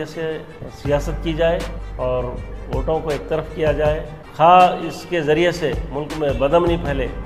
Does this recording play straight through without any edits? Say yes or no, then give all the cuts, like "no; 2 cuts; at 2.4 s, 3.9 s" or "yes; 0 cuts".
yes; 0 cuts